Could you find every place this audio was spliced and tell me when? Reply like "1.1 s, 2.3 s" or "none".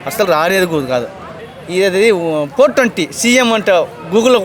1.4 s